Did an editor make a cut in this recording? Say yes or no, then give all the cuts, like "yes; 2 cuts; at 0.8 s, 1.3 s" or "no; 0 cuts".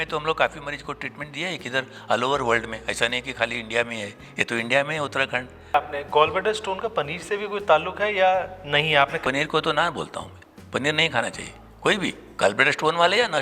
yes; 2 cuts; at 5.7 s, 9.2 s